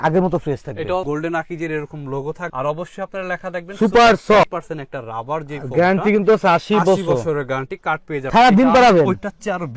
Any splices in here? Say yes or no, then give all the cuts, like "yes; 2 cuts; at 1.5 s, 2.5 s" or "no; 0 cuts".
yes; 2 cuts; at 1.1 s, 8.2 s